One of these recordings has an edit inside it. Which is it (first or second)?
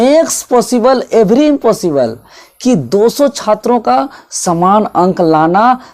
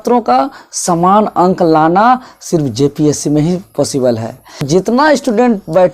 second